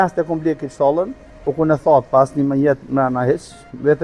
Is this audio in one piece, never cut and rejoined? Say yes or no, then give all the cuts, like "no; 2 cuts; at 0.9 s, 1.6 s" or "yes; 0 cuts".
yes; 0 cuts